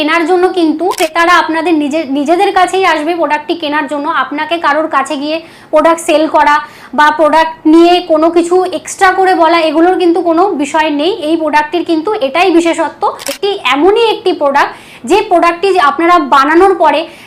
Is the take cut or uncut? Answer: cut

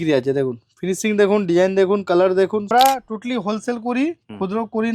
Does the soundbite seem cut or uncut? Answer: cut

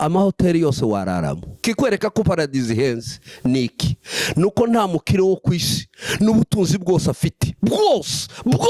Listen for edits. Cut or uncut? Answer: cut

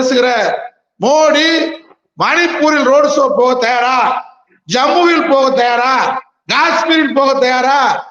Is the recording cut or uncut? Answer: uncut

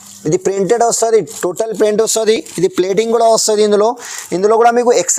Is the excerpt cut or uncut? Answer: uncut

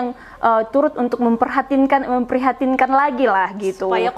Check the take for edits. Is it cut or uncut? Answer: uncut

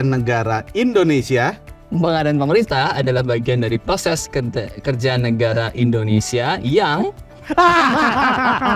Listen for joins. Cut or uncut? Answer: uncut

